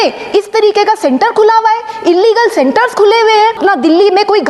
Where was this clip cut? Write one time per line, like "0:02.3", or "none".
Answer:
0:03.6